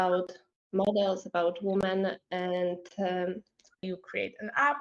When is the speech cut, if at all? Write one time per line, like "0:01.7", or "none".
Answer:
0:03.8

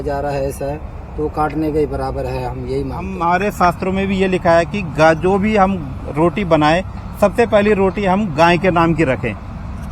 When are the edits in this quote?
0:03.1

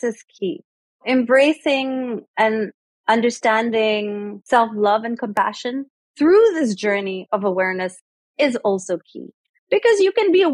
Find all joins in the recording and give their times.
0:01.0
0:02.2
0:04.3

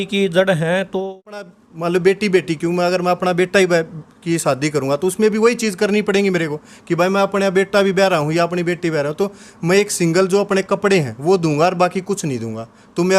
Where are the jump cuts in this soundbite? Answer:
0:01.5

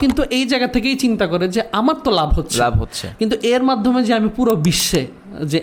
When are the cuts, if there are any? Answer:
none

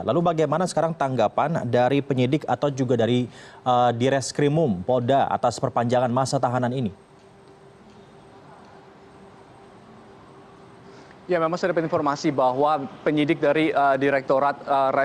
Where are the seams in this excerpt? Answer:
none

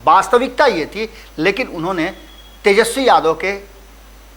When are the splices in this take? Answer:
none

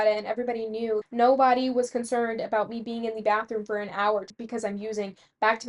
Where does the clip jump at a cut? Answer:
0:01.0
0:04.3

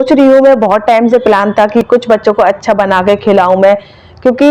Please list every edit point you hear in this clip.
none

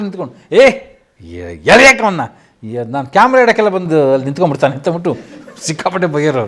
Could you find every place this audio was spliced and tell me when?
none

